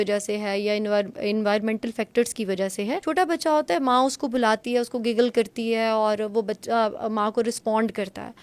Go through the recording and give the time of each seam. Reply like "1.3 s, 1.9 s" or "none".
3.0 s